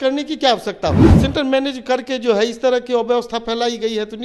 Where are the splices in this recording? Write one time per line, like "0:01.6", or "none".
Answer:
0:01.2